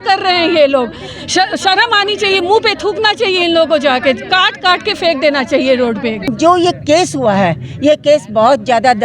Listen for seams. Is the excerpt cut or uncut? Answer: cut